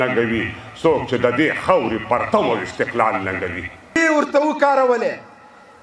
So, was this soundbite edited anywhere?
yes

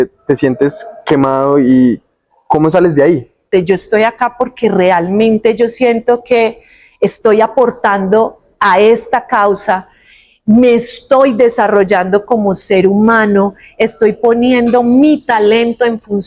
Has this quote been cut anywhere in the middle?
yes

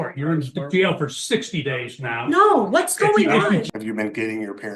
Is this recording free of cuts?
no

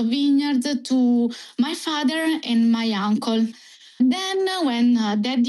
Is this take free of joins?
no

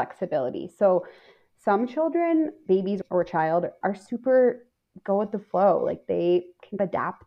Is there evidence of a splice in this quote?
no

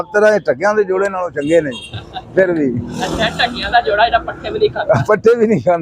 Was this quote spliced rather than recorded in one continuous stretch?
no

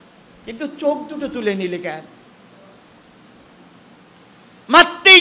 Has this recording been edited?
no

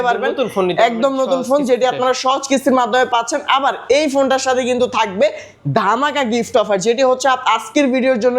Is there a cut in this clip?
no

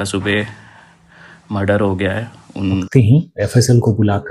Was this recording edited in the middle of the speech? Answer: yes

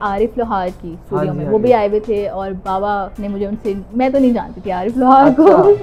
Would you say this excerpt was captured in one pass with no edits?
yes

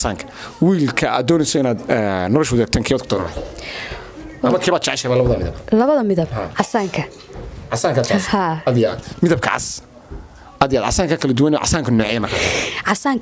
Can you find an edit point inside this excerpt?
no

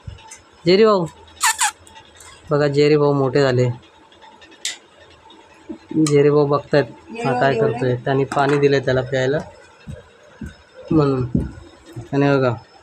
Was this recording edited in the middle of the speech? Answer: no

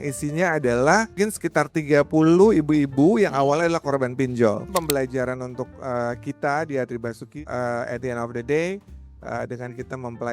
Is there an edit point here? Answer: yes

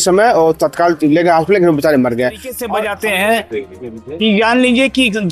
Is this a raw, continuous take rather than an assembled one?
no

